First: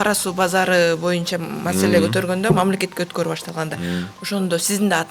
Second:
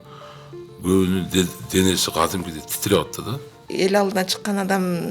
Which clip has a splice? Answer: second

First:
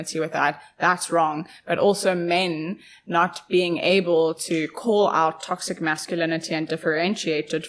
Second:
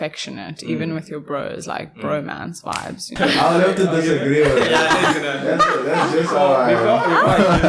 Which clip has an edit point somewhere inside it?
second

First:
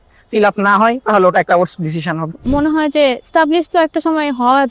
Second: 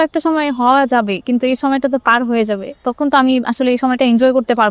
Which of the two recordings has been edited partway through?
first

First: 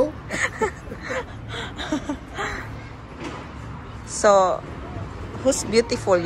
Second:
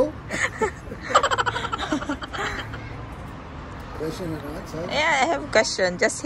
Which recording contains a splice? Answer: first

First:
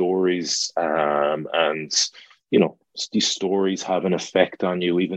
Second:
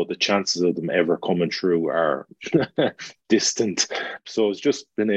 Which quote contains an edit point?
second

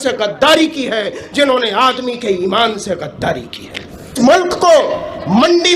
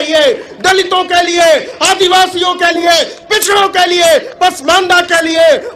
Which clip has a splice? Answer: first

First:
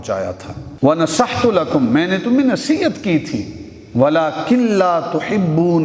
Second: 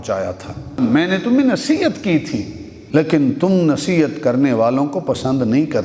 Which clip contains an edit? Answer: second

